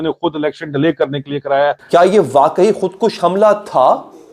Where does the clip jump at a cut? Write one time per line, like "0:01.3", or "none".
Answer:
0:01.8